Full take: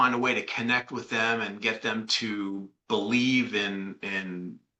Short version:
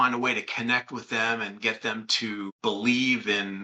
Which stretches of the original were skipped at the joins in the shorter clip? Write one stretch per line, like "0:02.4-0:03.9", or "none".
0:02.5-0:02.8